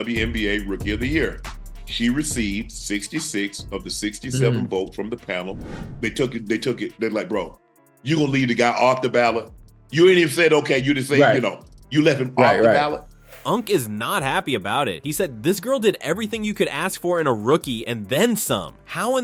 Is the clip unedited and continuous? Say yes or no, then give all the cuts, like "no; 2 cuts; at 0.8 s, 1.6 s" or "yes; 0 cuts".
yes; 0 cuts